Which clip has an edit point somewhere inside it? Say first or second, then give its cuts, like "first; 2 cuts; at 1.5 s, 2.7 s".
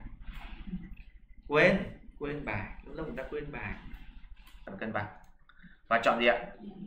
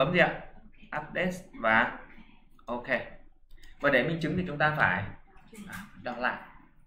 first; 1 cut; at 4.6 s